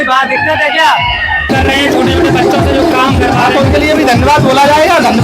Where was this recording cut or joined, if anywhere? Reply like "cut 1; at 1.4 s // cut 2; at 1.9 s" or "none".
cut 1; at 1.5 s